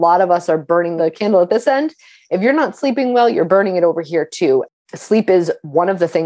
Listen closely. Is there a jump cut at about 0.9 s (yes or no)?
yes